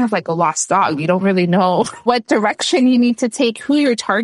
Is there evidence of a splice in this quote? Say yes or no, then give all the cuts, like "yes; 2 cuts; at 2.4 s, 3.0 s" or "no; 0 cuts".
yes; 1 cut; at 2.0 s